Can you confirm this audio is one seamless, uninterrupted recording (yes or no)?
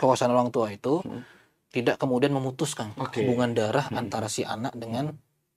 yes